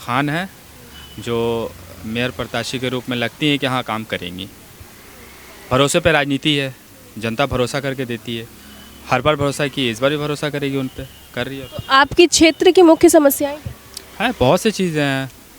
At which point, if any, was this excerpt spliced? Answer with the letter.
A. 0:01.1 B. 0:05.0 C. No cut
C